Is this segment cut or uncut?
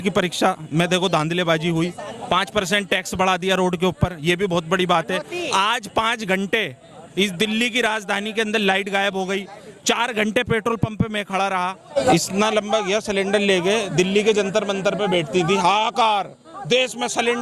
cut